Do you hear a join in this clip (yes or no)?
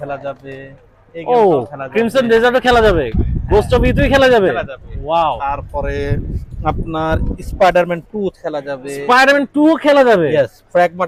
no